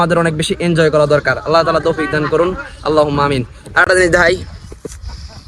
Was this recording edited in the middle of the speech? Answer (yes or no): no